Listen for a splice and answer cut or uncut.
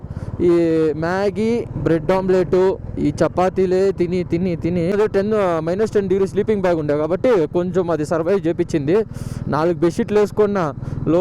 cut